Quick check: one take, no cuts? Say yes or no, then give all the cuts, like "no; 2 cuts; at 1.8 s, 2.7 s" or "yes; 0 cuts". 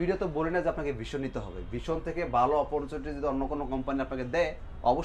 yes; 0 cuts